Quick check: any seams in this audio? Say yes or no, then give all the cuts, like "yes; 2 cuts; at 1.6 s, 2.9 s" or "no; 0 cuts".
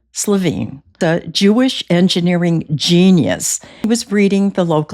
yes; 2 cuts; at 1.0 s, 3.9 s